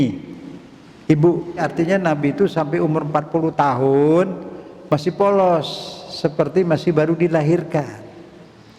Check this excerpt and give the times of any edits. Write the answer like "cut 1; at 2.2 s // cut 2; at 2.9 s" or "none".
cut 1; at 1.6 s